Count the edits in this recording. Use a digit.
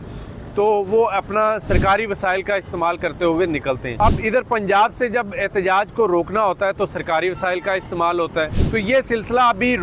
2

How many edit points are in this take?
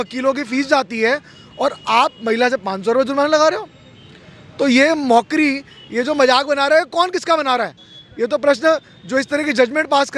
0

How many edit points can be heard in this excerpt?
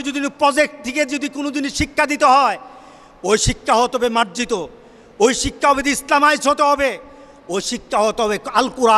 0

